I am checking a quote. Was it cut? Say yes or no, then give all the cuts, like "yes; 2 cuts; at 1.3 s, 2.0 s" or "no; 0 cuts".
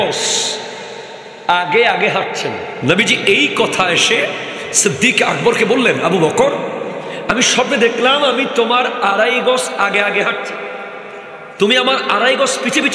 yes; 1 cut; at 2.7 s